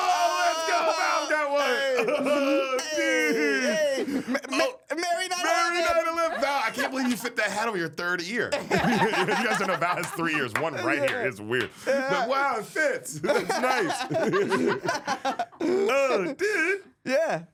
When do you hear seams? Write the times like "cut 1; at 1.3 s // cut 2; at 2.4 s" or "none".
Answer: none